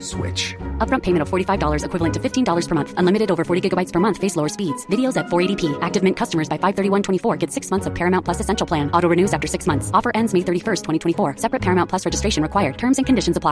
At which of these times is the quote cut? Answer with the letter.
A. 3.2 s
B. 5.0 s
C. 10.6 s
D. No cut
D